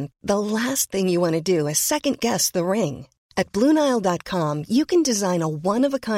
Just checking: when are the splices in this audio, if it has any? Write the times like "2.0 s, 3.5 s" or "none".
none

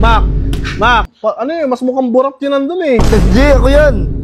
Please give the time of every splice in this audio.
1.1 s

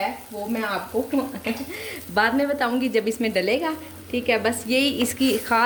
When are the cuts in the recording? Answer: none

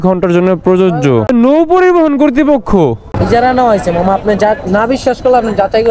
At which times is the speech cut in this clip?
1.3 s, 3.1 s

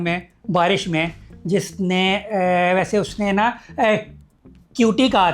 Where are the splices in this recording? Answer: none

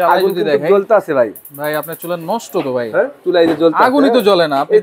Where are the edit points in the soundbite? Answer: 3.2 s

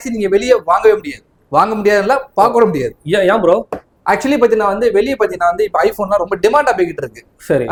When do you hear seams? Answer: none

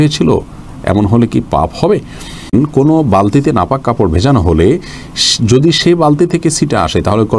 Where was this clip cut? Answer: 2.5 s

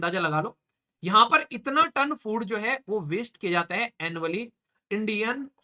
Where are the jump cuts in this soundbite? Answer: none

